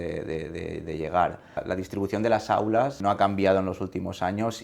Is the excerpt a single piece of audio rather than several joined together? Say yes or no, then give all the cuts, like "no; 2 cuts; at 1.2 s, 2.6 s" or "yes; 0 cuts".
no; 2 cuts; at 1.6 s, 3.0 s